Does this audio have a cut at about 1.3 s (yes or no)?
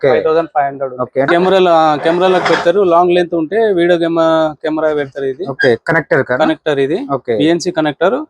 yes